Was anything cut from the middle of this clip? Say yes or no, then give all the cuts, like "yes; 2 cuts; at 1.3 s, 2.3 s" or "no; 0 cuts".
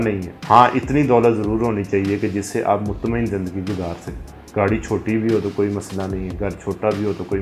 no; 0 cuts